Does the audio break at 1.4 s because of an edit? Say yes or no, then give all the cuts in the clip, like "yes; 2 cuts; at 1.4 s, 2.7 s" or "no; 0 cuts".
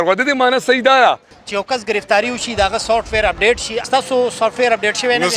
yes; 1 cut; at 1.4 s